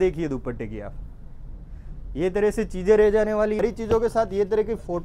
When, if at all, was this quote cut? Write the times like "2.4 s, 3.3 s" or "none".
3.6 s